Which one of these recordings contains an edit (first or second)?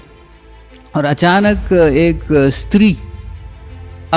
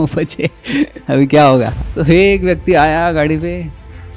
second